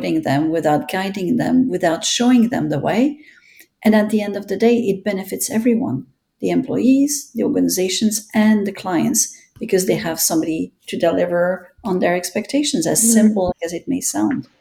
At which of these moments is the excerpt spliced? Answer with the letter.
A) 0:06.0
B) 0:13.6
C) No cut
B